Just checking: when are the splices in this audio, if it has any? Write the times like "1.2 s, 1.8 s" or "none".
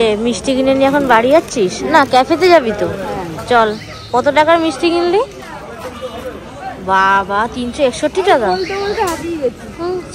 none